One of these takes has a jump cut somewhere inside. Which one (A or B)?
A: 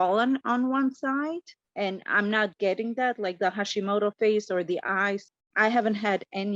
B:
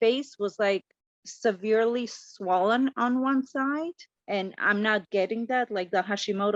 A